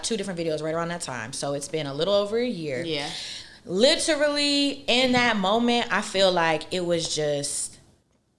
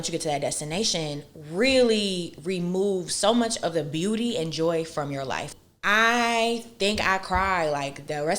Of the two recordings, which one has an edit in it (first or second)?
second